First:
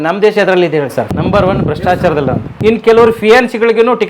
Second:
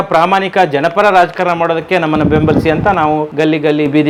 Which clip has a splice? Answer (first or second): first